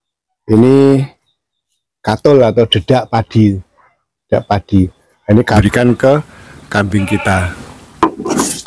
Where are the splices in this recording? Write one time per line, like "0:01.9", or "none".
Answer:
0:05.6

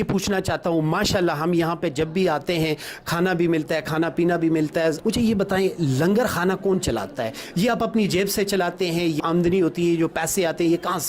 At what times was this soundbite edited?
0:05.0
0:09.2

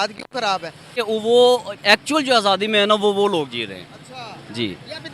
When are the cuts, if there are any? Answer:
0:00.9

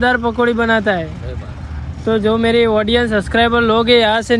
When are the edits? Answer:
none

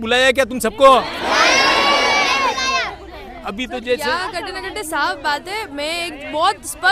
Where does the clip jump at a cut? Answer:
none

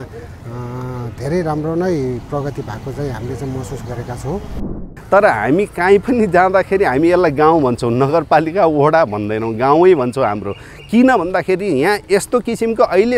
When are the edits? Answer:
0:05.0

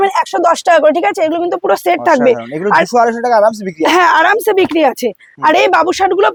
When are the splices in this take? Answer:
none

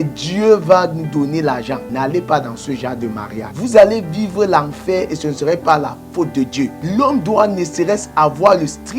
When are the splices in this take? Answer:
0:01.9
0:03.5
0:06.8

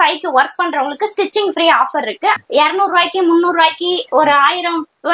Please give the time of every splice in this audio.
0:02.4

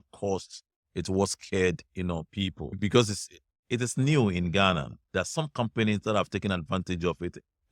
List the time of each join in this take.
0:02.8
0:05.0

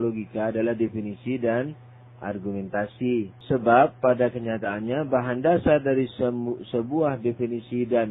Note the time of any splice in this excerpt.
0:03.4

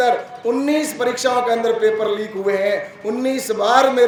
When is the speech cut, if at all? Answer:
none

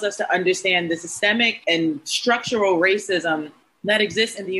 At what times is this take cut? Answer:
none

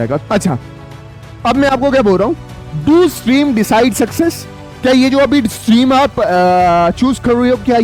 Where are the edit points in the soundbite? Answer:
none

